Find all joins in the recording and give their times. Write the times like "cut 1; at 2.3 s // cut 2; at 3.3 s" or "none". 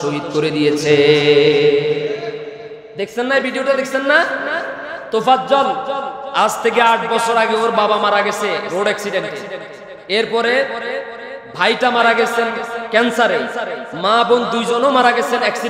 none

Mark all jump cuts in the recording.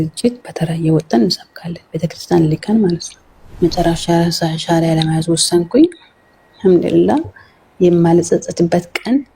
cut 1; at 3.6 s

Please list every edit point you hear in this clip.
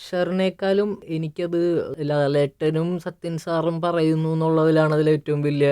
cut 1; at 1.0 s // cut 2; at 1.9 s

